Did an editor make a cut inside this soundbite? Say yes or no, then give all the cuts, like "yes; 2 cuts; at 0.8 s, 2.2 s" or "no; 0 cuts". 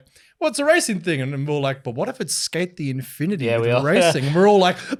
no; 0 cuts